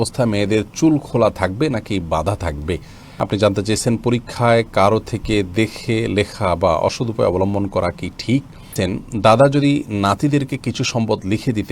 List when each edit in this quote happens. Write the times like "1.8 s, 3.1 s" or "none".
3.2 s, 8.8 s